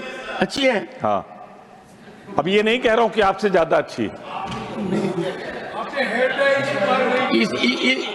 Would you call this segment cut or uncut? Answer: uncut